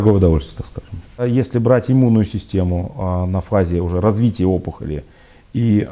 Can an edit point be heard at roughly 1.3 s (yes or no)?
yes